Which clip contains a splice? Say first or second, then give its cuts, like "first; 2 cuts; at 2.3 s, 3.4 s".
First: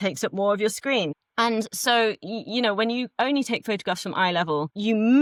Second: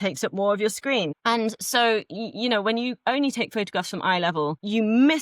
second; 1 cut; at 1.1 s